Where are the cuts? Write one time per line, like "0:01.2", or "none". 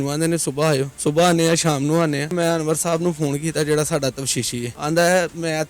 0:00.9
0:02.3
0:04.8